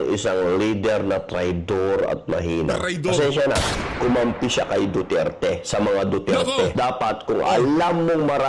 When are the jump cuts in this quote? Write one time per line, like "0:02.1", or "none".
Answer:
0:04.1